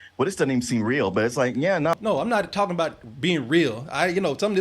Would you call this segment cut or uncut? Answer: cut